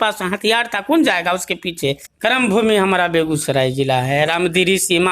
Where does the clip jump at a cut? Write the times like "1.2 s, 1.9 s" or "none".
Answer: 2.1 s

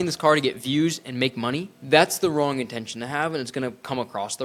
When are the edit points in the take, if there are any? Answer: 1.7 s

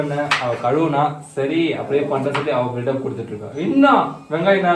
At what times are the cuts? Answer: none

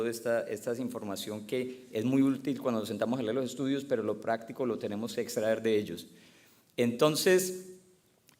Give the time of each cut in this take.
none

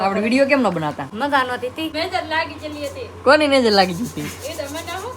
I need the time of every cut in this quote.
1.1 s, 1.9 s

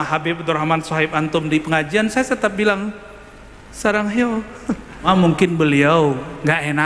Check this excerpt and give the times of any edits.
5.1 s

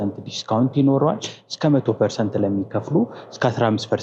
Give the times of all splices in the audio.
none

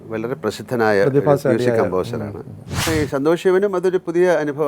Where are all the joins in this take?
2.9 s

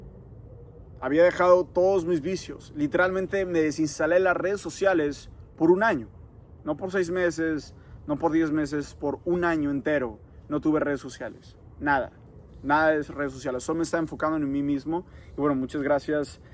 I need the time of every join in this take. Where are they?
none

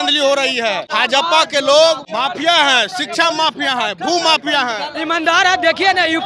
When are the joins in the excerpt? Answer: 0.9 s, 2.0 s, 4.9 s

